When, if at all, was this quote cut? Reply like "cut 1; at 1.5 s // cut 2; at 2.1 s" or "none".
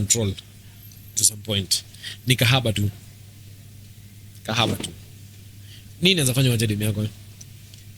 none